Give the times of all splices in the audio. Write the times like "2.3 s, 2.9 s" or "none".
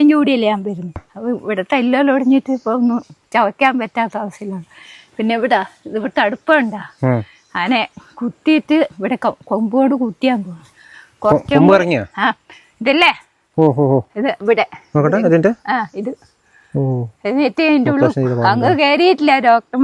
1.1 s